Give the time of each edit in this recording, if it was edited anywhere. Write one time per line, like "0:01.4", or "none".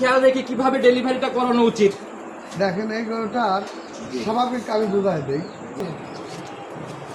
0:05.8